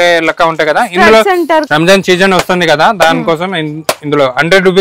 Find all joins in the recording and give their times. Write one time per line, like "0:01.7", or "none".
0:01.7